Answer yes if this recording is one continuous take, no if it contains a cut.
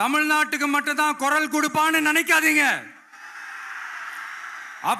yes